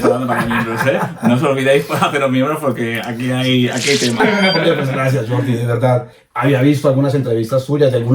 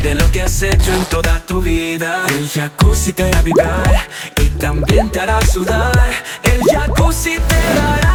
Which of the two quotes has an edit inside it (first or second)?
first